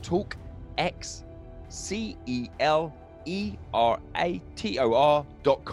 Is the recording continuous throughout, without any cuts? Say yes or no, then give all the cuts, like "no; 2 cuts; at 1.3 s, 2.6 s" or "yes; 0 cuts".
yes; 0 cuts